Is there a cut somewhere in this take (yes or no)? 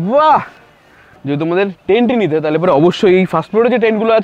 yes